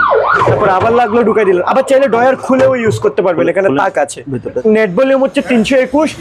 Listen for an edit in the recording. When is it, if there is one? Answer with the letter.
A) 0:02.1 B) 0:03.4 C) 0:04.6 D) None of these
C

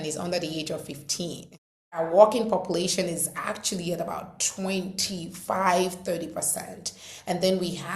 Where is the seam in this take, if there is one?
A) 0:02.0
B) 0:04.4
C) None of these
A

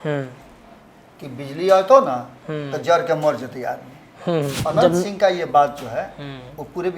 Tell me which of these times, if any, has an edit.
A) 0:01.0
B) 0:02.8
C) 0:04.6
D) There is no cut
C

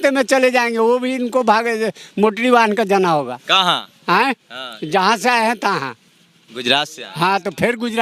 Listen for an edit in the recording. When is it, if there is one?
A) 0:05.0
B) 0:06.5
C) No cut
C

